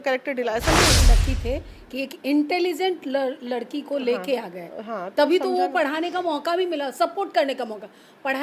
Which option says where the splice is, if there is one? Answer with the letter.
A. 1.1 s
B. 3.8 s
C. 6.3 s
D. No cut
A